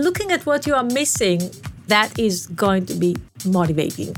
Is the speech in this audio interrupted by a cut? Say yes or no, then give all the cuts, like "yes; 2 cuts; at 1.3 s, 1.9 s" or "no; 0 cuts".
yes; 2 cuts; at 1.9 s, 3.3 s